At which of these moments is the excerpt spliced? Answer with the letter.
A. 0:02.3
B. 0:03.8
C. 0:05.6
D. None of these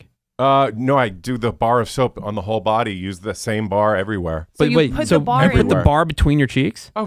D